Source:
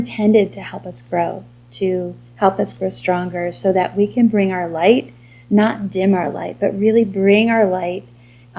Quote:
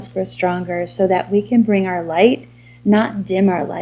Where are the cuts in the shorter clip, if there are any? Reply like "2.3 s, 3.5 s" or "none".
none